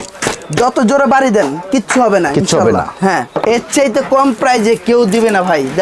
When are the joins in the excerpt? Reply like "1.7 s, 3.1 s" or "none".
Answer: 3.4 s